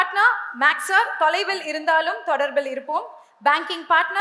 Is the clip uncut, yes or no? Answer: yes